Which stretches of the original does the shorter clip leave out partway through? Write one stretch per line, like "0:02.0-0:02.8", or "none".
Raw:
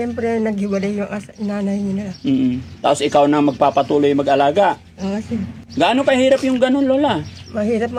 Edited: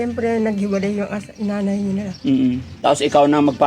none